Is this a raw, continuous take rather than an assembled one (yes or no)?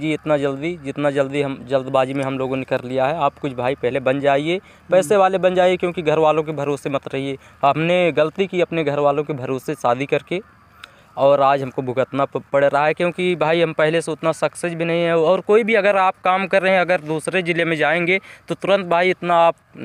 yes